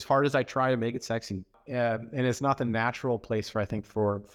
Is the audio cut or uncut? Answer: cut